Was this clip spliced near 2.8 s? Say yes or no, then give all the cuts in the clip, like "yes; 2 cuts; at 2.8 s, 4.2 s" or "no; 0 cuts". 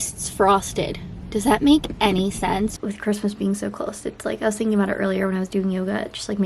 yes; 1 cut; at 2.8 s